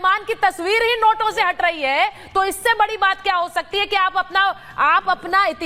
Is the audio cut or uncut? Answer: uncut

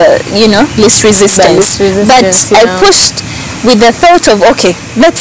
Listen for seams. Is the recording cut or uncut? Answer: uncut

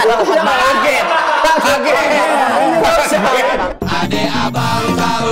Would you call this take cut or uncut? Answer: cut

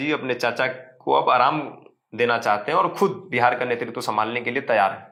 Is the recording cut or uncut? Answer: uncut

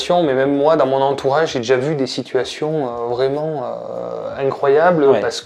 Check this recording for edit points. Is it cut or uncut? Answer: uncut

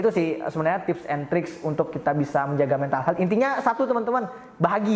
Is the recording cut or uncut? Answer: uncut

